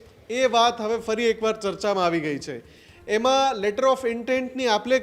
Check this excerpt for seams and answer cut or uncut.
uncut